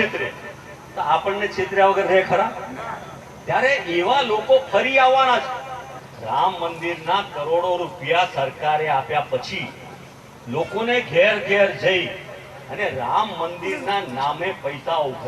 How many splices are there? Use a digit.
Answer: 0